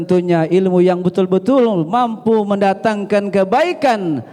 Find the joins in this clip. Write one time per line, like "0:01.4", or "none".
none